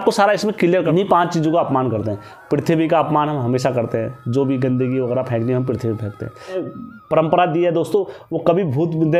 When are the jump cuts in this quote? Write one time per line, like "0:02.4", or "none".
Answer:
0:00.9
0:06.6